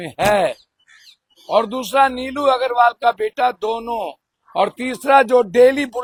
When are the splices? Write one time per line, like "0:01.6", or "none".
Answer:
none